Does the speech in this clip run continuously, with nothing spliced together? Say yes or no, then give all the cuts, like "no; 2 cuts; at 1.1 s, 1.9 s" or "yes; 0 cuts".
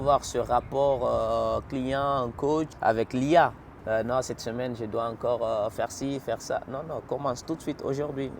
no; 2 cuts; at 2.7 s, 3.7 s